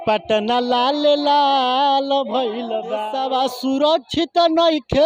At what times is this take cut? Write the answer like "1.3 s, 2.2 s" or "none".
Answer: 3.0 s